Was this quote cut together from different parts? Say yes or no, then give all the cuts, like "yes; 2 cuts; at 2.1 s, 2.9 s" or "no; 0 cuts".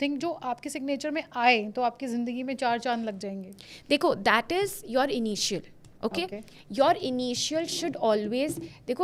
no; 0 cuts